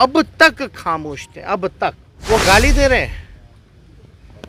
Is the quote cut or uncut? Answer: cut